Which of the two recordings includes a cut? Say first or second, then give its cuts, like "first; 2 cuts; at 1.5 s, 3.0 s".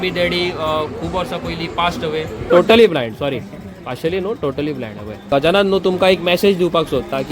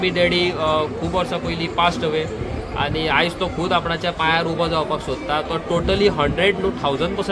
first; 2 cuts; at 2.5 s, 5.3 s